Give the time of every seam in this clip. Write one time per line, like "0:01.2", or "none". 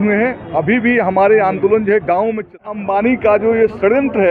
0:02.7